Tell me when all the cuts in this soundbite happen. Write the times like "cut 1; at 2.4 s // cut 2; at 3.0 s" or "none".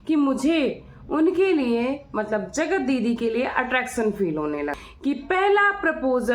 cut 1; at 4.8 s